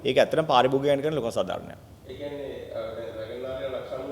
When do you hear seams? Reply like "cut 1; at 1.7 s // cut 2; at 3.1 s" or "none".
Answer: none